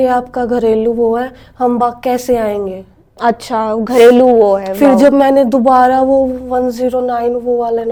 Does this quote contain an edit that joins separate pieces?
no; 0 cuts

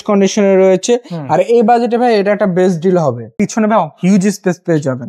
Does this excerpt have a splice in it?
yes; 1 cut; at 3.3 s

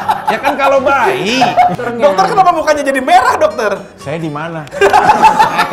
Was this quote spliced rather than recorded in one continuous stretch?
yes; 1 cut; at 1.7 s

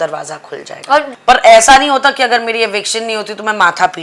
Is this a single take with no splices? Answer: no; 1 cut; at 1.1 s

